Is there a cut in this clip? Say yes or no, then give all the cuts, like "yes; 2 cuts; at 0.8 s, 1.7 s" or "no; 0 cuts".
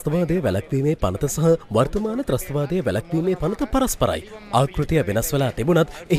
no; 0 cuts